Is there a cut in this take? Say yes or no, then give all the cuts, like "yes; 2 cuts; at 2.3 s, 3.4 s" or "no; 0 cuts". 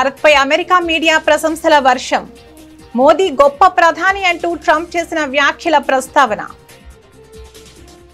no; 0 cuts